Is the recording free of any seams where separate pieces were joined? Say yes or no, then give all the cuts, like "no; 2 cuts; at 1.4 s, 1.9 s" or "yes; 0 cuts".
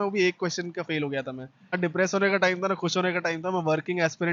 no; 1 cut; at 1.7 s